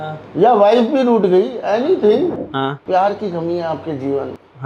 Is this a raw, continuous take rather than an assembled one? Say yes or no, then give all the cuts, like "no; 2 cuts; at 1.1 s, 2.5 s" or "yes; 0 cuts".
yes; 0 cuts